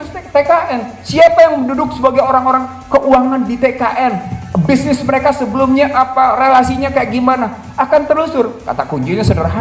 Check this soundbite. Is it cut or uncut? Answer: uncut